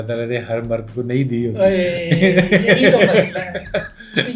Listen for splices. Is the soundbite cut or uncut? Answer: uncut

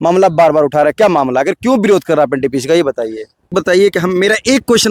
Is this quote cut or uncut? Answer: cut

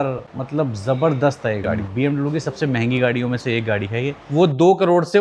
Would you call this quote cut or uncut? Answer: cut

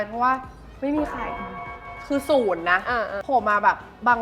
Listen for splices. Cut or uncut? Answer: cut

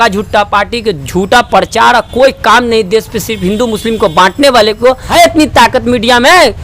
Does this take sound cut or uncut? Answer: cut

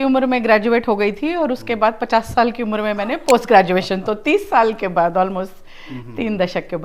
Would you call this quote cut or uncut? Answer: uncut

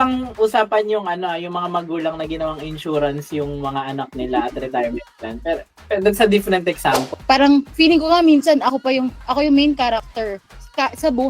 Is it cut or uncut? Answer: cut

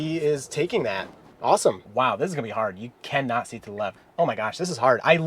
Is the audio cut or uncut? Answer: cut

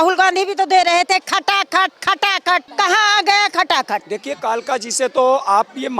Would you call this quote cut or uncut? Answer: cut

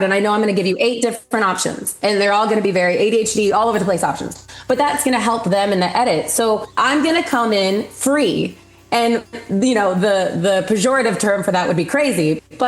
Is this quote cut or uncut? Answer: cut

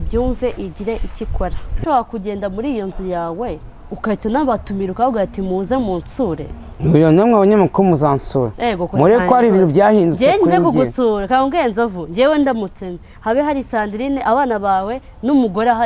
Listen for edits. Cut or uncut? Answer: cut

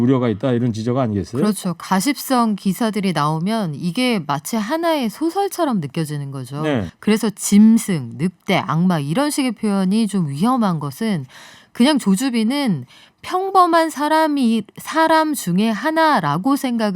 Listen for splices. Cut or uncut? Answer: cut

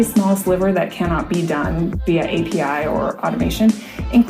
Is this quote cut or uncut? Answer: uncut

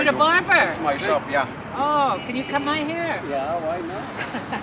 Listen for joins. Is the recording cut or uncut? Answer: uncut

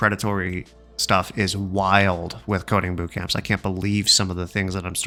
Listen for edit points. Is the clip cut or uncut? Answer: uncut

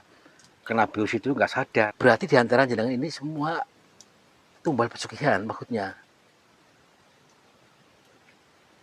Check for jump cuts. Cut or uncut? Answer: cut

